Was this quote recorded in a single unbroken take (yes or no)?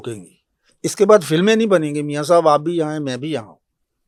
yes